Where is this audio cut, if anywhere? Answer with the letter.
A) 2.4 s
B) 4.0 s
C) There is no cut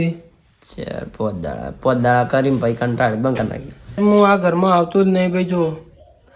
B